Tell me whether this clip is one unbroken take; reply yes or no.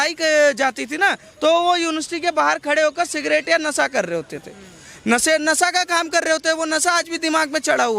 yes